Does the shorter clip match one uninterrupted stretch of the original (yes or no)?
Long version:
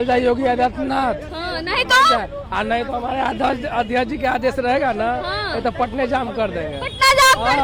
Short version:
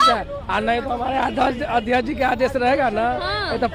yes